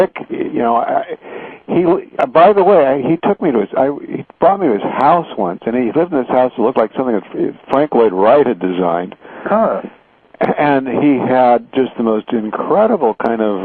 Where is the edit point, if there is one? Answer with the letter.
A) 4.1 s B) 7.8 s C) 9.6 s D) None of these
C